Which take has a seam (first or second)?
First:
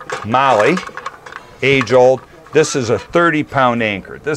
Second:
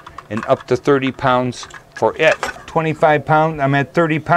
second